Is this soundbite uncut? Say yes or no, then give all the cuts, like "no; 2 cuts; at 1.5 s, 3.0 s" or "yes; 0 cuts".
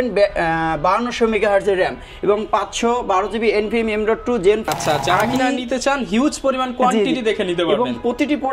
no; 1 cut; at 4.7 s